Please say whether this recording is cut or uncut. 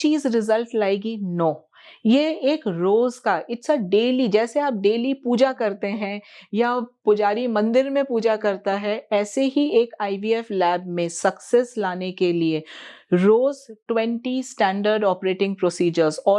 uncut